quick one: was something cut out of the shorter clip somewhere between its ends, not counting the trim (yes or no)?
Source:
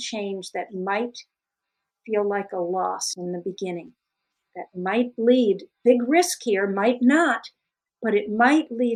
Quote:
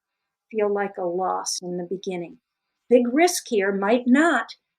yes